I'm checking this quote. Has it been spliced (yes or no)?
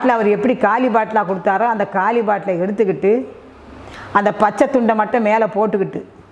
no